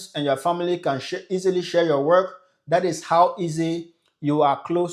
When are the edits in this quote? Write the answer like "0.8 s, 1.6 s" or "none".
none